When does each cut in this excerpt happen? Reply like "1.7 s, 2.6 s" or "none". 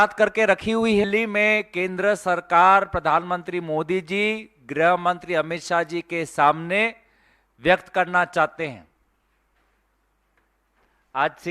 1.0 s